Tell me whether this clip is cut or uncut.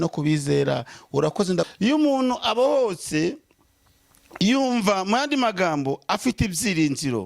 cut